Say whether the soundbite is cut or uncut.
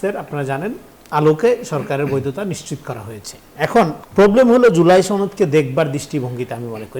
cut